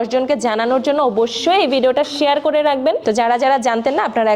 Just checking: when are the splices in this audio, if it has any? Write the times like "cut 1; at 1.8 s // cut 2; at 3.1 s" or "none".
cut 1; at 3.0 s